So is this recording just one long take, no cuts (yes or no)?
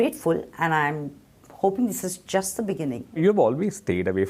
no